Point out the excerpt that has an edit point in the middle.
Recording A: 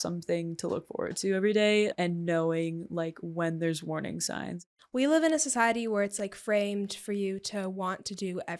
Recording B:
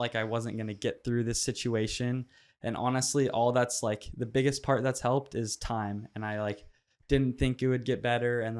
A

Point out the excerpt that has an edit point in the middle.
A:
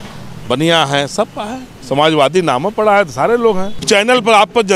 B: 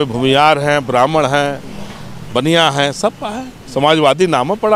A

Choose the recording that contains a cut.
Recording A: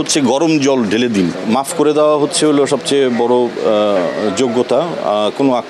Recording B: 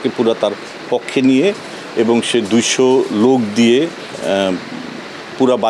A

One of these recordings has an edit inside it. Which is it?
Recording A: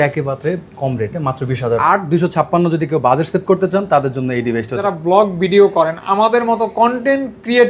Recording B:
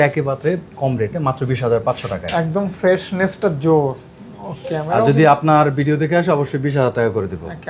A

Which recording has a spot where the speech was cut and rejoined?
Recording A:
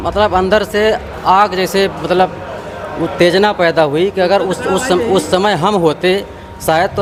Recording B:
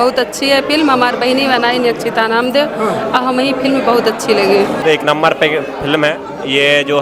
B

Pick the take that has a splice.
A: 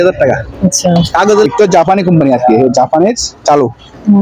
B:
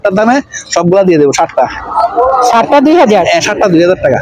A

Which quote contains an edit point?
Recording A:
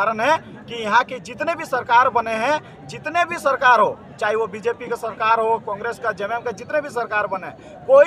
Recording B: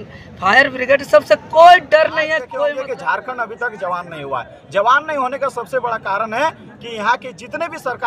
B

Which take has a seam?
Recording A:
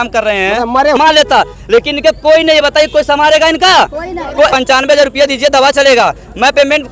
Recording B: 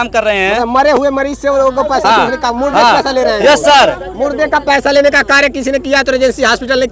A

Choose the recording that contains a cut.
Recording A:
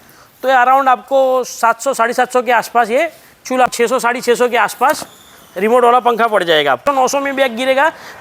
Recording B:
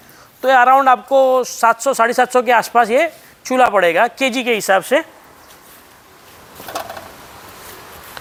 A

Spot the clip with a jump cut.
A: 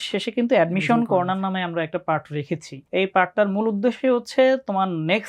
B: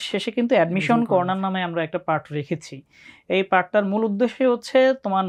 A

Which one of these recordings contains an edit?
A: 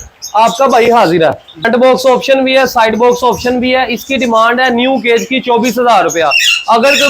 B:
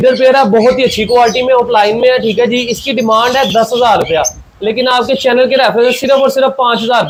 A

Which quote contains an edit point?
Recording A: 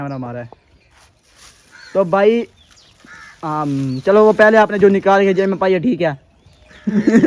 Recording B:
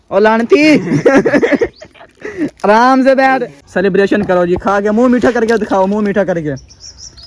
B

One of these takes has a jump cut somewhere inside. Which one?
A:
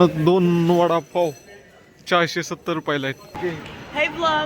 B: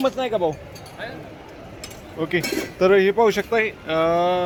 A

